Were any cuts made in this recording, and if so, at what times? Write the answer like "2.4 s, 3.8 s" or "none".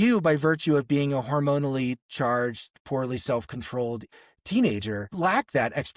4.1 s, 5.1 s